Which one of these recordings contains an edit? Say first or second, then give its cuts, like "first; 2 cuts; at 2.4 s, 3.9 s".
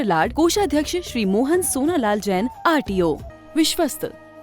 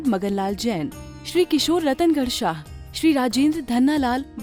first; 1 cut; at 3.3 s